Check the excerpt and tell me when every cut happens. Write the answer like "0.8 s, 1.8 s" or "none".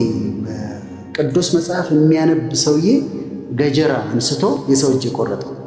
4.6 s